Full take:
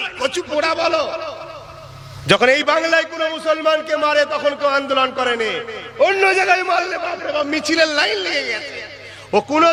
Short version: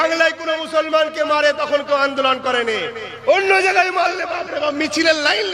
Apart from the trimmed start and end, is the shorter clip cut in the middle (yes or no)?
no